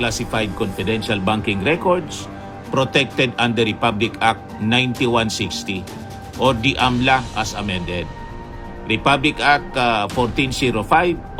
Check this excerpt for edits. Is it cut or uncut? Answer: uncut